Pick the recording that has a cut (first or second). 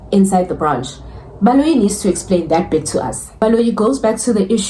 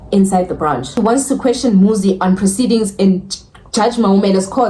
second